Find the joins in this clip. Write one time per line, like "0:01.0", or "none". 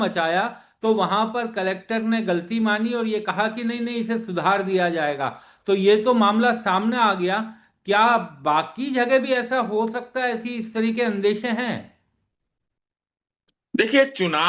none